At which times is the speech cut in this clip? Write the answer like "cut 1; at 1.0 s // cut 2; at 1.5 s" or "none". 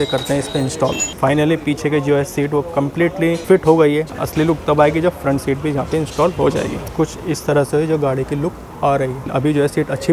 cut 1; at 1.1 s // cut 2; at 3.4 s // cut 3; at 4.2 s // cut 4; at 6.8 s // cut 5; at 9.3 s